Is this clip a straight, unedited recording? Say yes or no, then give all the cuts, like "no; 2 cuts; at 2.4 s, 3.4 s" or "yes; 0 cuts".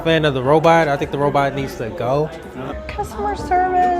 no; 1 cut; at 2.7 s